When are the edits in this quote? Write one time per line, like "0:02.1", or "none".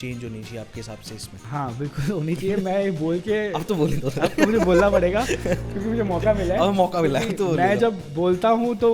0:01.3

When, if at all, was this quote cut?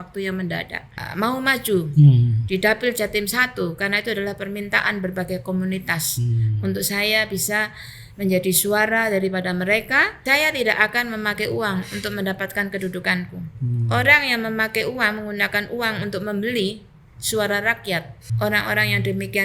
0:01.0
0:10.1
0:18.2

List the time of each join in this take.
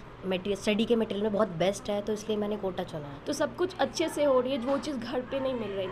0:03.1

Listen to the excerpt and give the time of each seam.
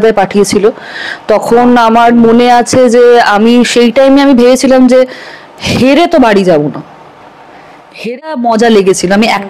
0:08.0

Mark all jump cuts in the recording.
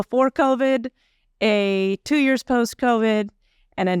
none

